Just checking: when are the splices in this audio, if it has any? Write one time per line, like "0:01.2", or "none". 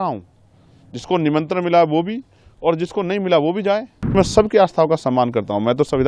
0:04.2